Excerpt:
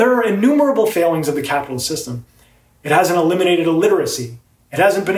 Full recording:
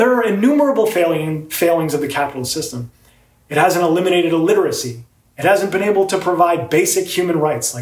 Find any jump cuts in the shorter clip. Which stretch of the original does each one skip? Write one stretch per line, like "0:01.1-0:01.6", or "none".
0:00.9-0:01.6